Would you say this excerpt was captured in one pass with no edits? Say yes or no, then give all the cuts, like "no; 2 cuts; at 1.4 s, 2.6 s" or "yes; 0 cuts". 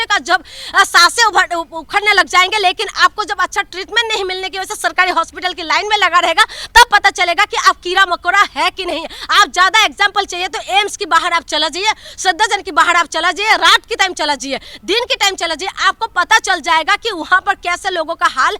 yes; 0 cuts